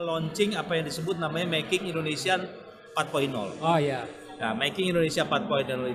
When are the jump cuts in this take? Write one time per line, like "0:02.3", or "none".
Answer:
none